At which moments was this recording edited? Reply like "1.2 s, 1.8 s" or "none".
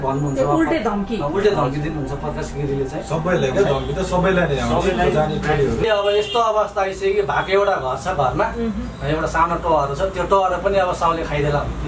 5.8 s